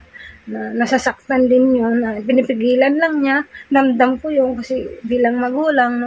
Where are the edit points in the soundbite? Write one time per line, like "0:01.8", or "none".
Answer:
none